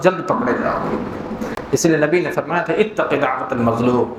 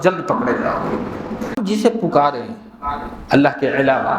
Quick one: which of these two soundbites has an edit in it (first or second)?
second